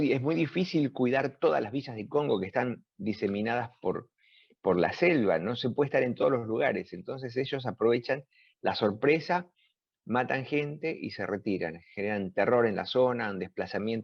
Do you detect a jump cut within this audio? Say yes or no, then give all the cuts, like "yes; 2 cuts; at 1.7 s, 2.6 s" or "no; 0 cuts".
no; 0 cuts